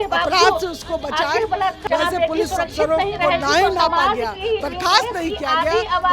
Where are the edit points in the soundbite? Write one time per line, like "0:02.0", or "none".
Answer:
0:01.8